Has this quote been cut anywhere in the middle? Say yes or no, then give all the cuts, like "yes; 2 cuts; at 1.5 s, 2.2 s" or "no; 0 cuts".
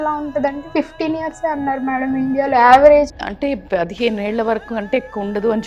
yes; 1 cut; at 3.1 s